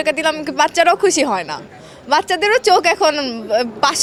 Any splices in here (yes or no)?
no